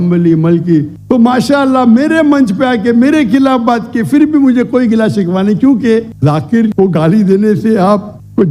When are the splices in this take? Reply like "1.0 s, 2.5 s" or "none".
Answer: 1.0 s, 6.1 s